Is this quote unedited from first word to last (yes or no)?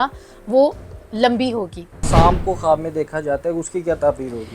no